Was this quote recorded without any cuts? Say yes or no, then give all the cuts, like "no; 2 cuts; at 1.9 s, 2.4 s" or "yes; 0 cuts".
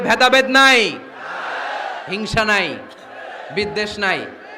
yes; 0 cuts